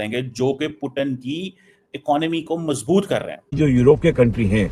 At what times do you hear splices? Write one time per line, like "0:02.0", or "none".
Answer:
none